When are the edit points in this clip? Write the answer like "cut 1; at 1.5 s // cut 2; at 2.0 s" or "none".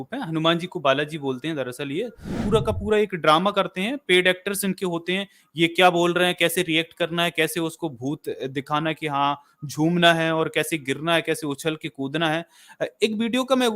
cut 1; at 2.4 s